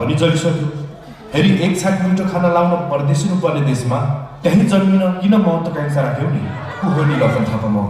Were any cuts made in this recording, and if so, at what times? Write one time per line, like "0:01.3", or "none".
0:06.7